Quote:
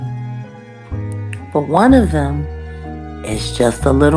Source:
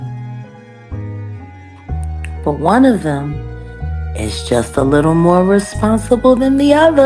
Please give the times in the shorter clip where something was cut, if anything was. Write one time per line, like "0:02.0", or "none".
0:01.5